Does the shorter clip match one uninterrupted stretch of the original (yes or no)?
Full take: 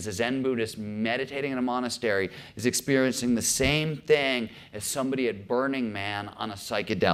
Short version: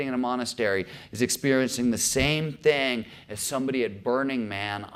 yes